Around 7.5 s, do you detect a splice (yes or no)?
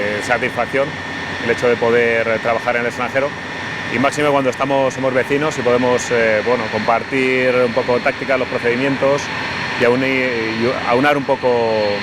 yes